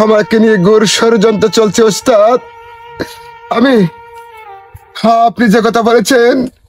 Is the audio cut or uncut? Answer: uncut